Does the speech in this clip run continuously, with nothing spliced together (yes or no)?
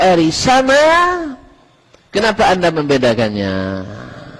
yes